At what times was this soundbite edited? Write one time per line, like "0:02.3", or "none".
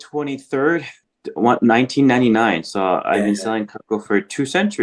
0:01.0